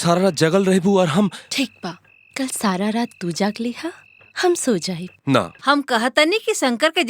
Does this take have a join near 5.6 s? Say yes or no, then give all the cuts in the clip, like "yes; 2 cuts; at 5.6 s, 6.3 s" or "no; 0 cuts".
yes; 1 cut; at 5.6 s